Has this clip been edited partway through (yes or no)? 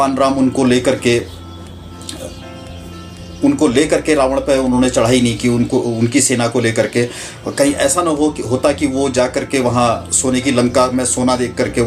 no